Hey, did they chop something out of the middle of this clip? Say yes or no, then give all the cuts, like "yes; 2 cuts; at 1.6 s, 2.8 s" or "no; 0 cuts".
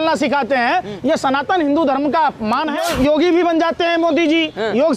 yes; 1 cut; at 2.8 s